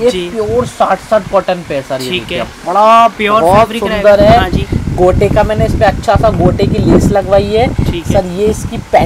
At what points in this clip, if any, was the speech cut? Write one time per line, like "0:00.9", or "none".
none